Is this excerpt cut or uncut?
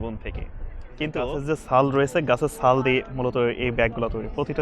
cut